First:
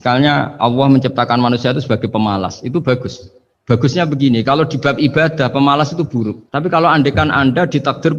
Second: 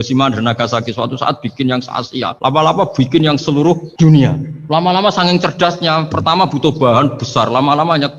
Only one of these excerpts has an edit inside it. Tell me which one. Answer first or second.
second